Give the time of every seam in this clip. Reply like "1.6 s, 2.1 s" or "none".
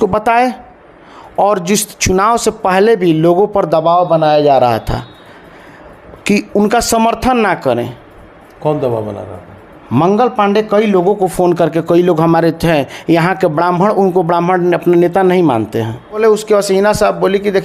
16.2 s